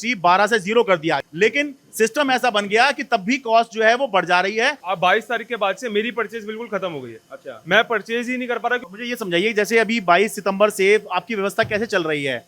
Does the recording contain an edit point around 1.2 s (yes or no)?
yes